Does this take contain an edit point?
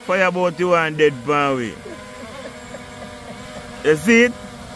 no; 0 cuts

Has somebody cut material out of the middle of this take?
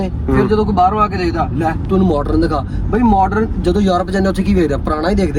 no; 0 cuts

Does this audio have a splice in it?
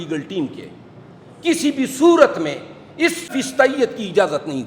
yes; 1 cut; at 3.3 s

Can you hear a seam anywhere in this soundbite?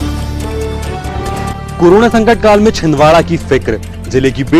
yes; 1 cut; at 1.4 s

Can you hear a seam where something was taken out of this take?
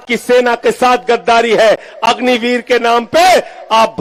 no; 0 cuts

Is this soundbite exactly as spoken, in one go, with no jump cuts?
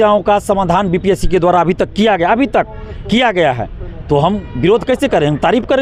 yes; 0 cuts

